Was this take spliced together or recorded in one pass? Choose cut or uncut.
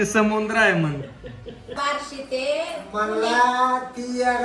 cut